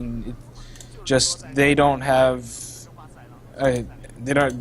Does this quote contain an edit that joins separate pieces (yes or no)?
yes